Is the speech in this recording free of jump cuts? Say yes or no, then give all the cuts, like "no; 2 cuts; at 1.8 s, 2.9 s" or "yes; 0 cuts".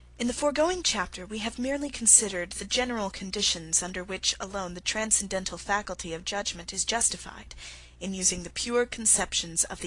no; 1 cut; at 1.8 s